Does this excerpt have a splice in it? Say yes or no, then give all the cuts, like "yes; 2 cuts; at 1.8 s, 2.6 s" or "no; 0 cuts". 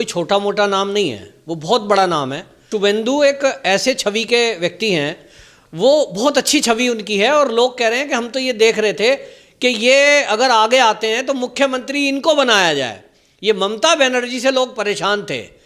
yes; 1 cut; at 2.7 s